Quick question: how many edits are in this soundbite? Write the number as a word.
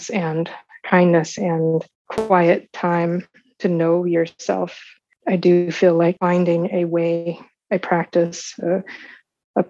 three